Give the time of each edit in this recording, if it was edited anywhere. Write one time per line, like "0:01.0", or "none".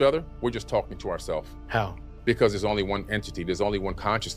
0:01.6